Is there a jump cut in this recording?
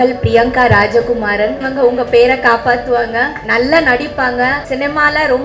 yes; 3 cuts; at 1.6 s, 3.4 s, 4.6 s

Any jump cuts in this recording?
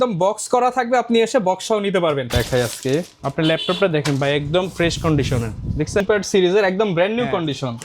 yes; 2 cuts; at 2.3 s, 6.0 s

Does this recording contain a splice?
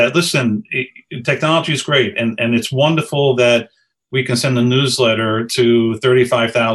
no; 0 cuts

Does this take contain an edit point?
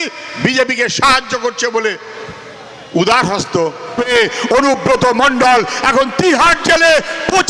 yes; 1 cut; at 4.0 s

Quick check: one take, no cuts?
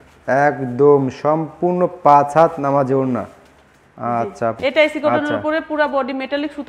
no; 1 cut; at 4.6 s

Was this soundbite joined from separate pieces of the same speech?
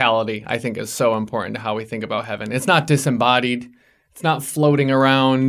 no; 0 cuts

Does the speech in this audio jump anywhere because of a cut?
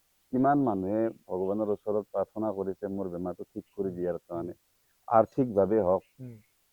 no; 0 cuts

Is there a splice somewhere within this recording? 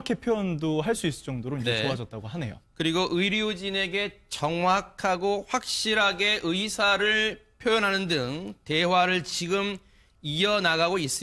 no; 0 cuts

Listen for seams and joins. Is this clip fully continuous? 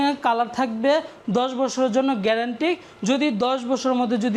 yes; 0 cuts

